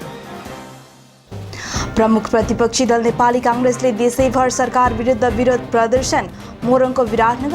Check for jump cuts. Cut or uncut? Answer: uncut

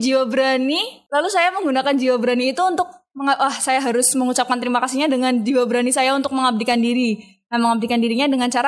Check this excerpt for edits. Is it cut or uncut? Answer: cut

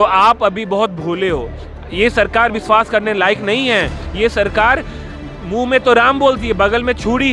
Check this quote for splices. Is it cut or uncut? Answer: uncut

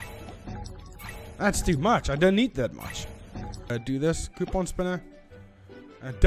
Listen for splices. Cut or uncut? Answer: cut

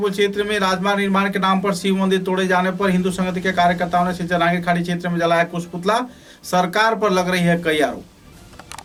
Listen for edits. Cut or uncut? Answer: uncut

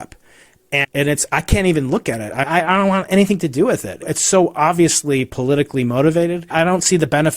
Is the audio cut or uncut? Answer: cut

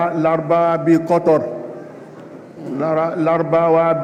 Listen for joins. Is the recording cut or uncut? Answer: uncut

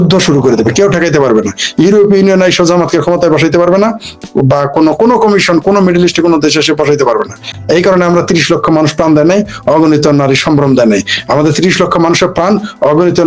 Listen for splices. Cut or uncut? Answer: uncut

